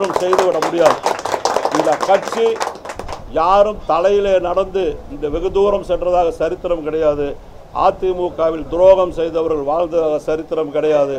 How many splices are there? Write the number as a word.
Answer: zero